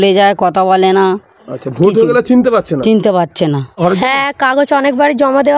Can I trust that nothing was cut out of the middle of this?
no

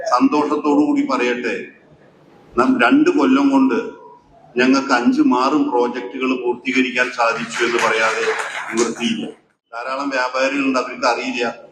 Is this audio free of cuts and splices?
no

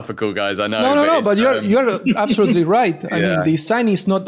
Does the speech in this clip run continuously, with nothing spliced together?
yes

